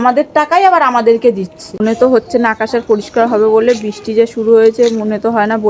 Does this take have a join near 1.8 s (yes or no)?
yes